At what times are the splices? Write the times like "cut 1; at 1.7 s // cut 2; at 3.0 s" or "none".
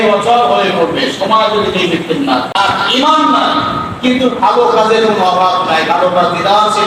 cut 1; at 2.5 s

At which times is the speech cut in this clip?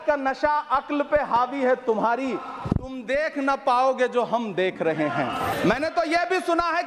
cut 1; at 5.5 s

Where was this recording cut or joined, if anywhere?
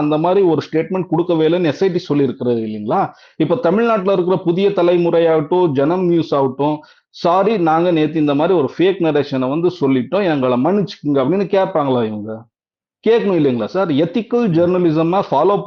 none

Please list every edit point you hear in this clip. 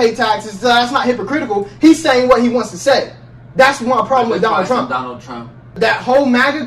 cut 1; at 5.7 s

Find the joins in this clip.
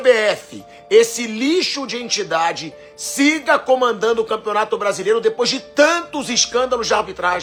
none

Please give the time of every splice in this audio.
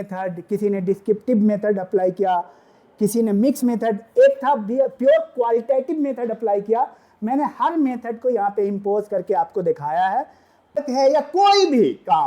cut 1; at 10.8 s

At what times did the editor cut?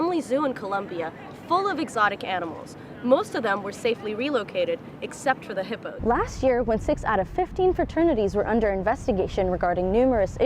cut 1; at 5.9 s

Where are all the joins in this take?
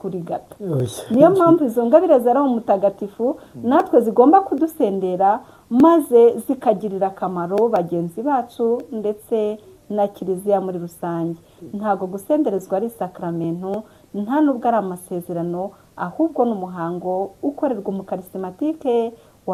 none

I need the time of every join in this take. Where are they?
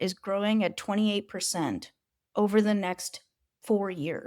none

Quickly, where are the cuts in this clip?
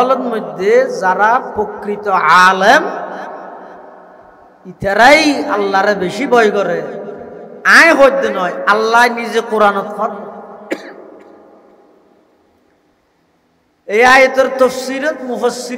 none

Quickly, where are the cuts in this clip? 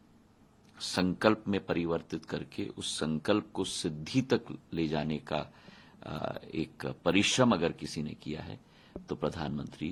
none

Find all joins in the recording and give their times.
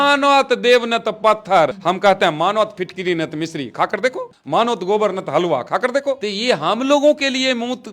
cut 1; at 1.8 s // cut 2; at 4.3 s // cut 3; at 6.3 s

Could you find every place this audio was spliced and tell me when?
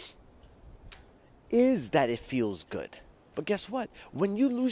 cut 1; at 3.2 s

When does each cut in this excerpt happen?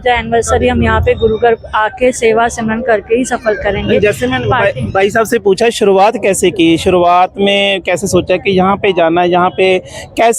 none

